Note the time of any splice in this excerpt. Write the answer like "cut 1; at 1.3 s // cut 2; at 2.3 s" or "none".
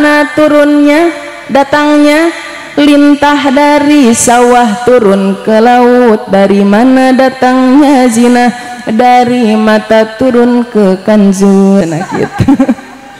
none